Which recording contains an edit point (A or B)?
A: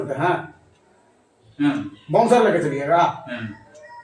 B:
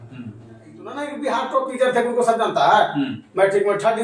B